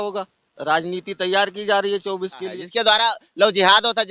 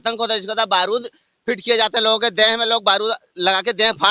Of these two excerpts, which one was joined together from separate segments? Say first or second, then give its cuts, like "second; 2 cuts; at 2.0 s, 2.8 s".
first; 1 cut; at 2.6 s